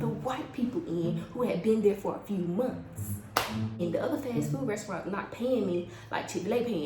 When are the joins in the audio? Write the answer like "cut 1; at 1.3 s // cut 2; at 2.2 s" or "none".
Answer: cut 1; at 3.8 s